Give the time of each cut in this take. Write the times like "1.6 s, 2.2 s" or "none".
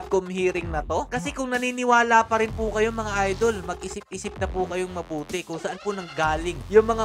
none